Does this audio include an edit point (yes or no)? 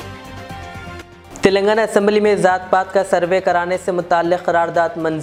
no